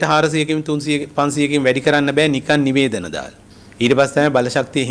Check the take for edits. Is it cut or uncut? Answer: uncut